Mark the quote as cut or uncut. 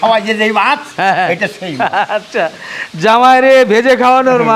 uncut